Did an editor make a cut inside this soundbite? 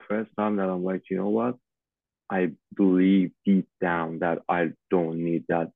no; 0 cuts

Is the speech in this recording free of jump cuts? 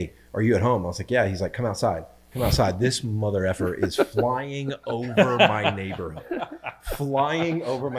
yes; 0 cuts

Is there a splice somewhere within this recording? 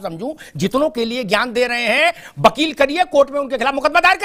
no; 0 cuts

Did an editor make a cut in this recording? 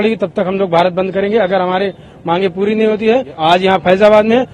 yes; 1 cut; at 3.3 s

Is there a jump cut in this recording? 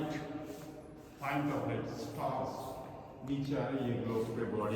no; 0 cuts

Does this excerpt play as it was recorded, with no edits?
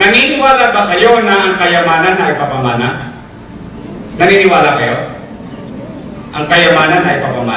yes; 0 cuts

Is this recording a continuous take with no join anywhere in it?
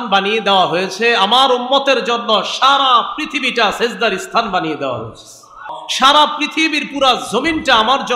no; 1 cut; at 5.8 s

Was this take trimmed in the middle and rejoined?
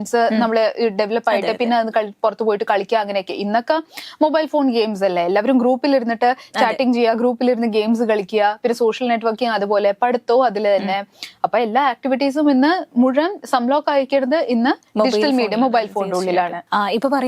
no; 0 cuts

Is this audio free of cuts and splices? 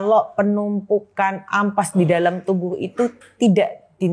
yes; 0 cuts

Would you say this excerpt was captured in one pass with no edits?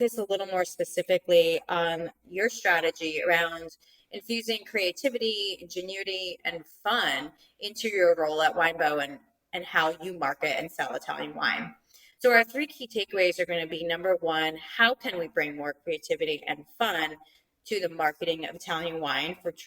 no; 1 cut; at 2.2 s

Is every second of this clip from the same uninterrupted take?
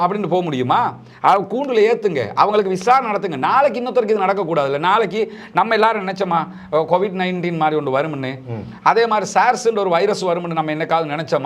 yes; 0 cuts

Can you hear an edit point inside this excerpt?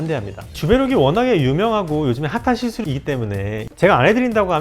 yes; 1 cut; at 3.7 s

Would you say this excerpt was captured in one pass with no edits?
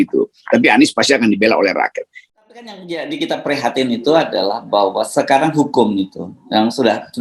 no; 1 cut; at 2.1 s

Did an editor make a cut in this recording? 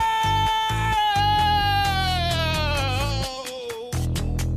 no; 0 cuts

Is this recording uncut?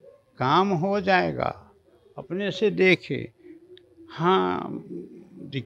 yes; 0 cuts

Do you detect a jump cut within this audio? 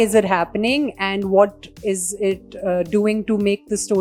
no; 0 cuts

